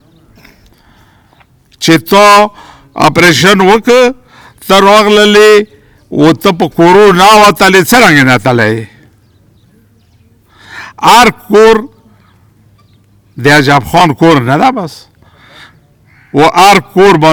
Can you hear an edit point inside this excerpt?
no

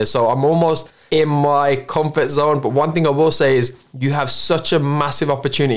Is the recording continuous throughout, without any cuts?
no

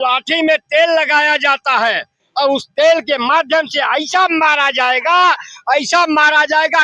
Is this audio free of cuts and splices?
yes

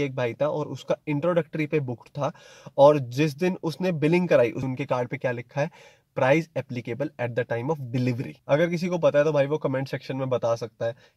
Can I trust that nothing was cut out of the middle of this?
no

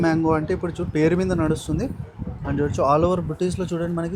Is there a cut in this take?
no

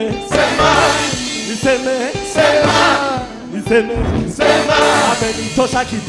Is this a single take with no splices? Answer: yes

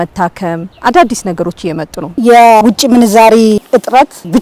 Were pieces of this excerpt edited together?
yes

